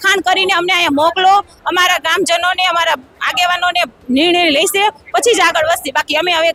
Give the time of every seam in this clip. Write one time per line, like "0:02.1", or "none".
none